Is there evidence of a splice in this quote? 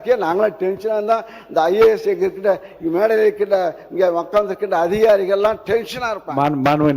no; 0 cuts

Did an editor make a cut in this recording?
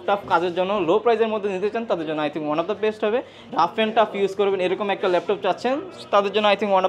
yes; 1 cut; at 3.4 s

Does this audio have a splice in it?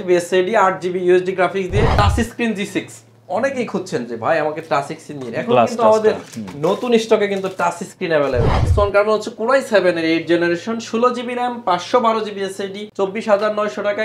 yes; 3 cuts; at 1.9 s, 8.6 s, 12.8 s

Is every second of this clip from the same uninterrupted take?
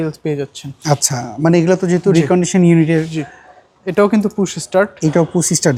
yes; 0 cuts

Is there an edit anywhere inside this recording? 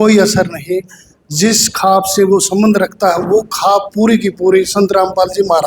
no; 0 cuts

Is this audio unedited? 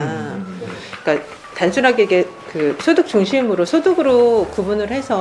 yes; 0 cuts

